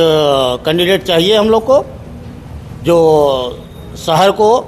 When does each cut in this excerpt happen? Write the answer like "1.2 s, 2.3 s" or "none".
none

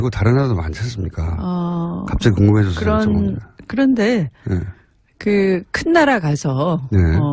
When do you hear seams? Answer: 3.4 s

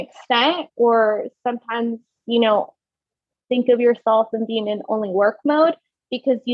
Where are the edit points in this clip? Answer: none

